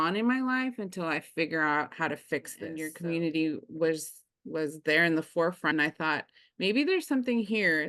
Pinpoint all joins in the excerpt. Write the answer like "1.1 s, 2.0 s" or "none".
2.8 s, 5.7 s